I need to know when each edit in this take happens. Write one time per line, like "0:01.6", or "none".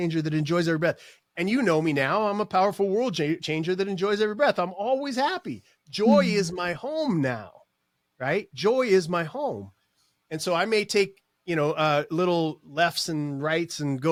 none